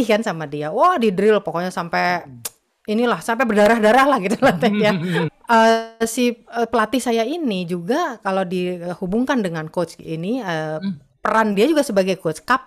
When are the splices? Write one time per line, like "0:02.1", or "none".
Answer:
0:05.3